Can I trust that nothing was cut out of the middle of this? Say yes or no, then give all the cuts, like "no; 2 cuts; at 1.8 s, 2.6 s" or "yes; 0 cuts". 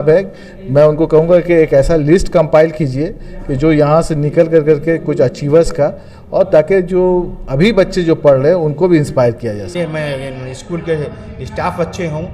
no; 1 cut; at 9.7 s